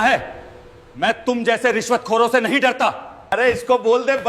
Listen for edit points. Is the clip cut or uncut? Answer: cut